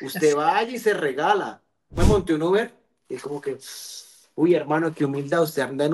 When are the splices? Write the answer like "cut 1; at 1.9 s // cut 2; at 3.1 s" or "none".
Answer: cut 1; at 2.0 s